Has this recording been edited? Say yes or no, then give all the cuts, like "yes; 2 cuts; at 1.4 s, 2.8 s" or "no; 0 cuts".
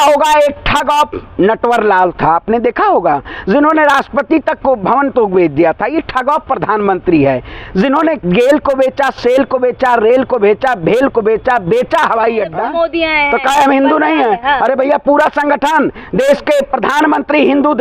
yes; 1 cut; at 12.6 s